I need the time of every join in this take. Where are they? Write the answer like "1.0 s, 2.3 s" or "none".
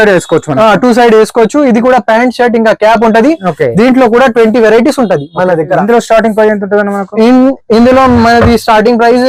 none